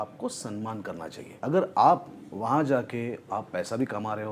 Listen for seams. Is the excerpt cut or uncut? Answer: cut